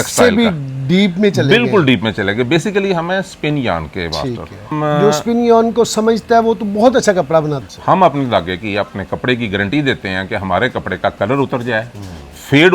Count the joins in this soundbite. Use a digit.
2